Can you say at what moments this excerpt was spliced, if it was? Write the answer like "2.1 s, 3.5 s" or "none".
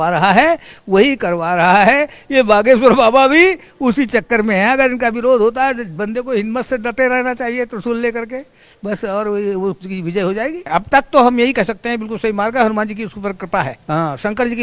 10.6 s, 13.8 s